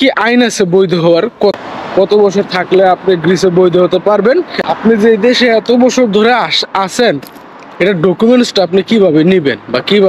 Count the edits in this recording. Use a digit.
2